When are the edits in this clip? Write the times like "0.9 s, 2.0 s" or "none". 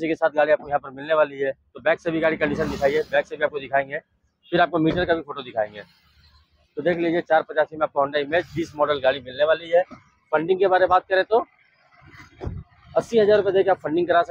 none